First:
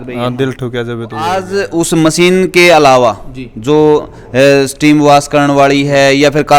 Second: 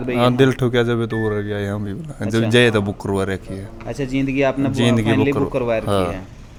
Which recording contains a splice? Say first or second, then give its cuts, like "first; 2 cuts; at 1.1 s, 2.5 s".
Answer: first; 1 cut; at 1.3 s